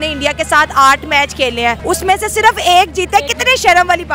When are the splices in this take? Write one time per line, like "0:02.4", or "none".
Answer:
0:01.8